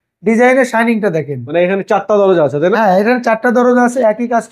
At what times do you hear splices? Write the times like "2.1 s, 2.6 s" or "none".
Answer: none